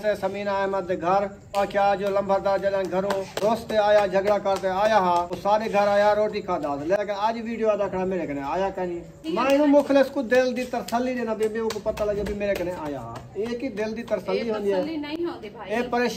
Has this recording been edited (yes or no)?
yes